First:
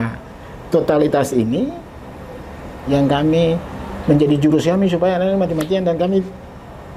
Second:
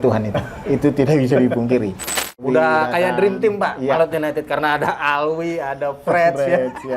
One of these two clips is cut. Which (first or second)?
second